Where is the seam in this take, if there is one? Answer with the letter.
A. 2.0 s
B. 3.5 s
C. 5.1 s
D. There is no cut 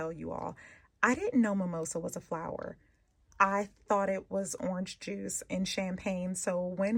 D